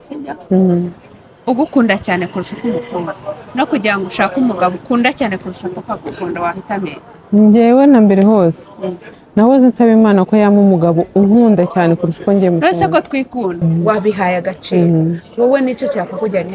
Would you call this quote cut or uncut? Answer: cut